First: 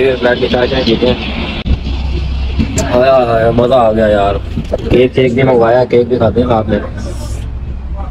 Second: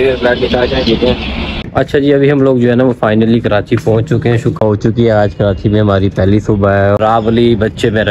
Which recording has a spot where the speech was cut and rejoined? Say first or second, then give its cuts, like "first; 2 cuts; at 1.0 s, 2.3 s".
second; 3 cuts; at 1.6 s, 4.6 s, 7.0 s